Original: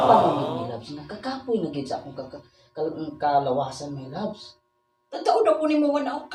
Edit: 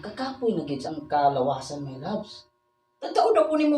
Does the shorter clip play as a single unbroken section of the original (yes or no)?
no